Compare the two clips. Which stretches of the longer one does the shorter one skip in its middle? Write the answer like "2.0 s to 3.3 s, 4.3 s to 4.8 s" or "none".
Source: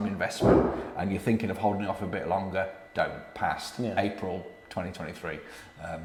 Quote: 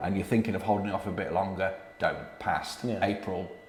none